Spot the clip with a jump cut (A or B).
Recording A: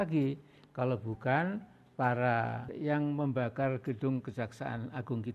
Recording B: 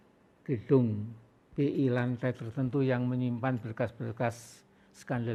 A